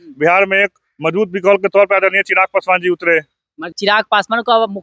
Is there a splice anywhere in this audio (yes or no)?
yes